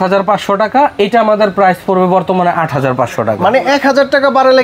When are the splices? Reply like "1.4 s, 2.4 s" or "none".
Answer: none